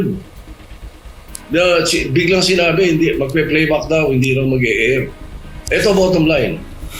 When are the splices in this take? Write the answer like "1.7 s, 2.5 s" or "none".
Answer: none